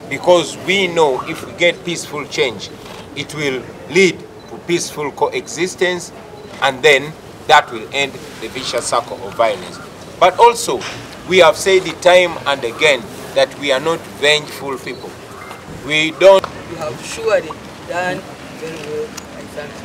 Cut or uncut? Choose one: cut